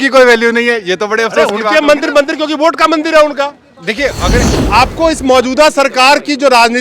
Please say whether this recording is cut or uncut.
cut